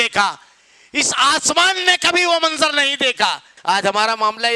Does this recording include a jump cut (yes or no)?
yes